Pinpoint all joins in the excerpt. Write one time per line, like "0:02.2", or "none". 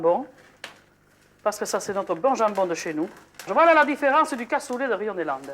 0:03.5